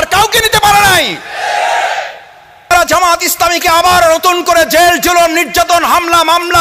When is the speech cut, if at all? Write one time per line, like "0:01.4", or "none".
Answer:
0:02.7